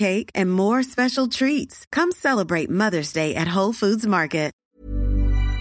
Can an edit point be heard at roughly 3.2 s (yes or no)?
no